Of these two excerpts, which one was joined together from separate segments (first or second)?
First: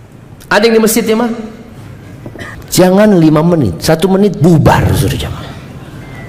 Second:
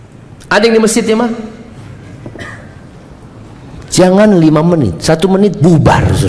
first